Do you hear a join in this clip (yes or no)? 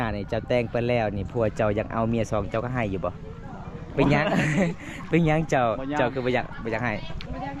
no